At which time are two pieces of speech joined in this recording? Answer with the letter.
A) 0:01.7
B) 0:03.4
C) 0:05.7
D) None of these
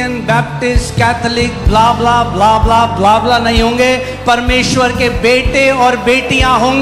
D